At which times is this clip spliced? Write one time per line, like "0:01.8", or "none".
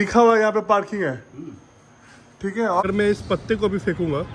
0:02.8